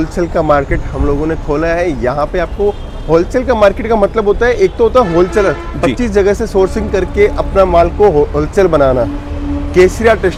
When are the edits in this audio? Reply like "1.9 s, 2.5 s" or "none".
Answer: none